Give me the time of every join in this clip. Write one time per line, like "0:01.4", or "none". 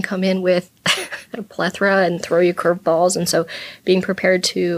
0:02.8